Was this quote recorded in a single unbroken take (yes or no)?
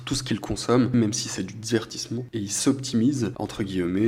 yes